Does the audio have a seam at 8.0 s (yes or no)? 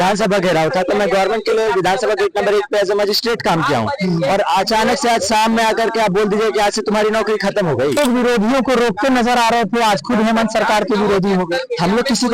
yes